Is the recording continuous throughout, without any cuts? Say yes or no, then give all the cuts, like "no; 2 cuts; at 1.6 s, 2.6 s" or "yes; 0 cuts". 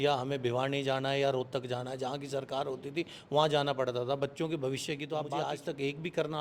no; 1 cut; at 5.3 s